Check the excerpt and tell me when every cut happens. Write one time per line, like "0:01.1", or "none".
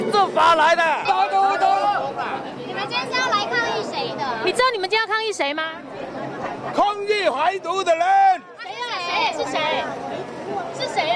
0:01.0